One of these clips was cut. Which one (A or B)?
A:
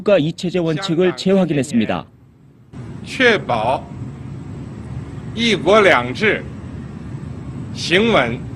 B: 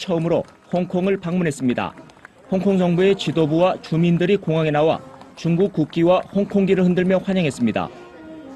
B